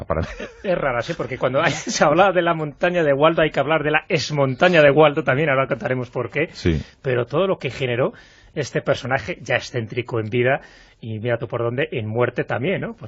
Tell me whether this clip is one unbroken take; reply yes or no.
no